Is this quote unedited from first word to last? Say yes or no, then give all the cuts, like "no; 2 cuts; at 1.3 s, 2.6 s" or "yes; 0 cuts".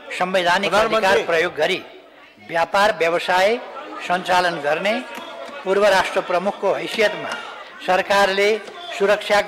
yes; 0 cuts